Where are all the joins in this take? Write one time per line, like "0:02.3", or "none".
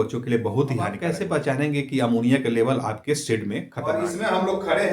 0:01.0
0:03.7